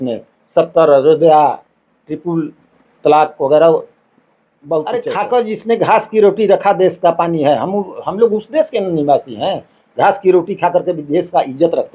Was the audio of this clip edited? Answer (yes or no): yes